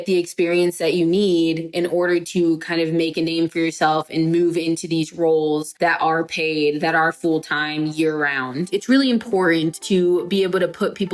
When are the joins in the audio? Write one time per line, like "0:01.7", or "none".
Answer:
0:05.7
0:08.7
0:09.8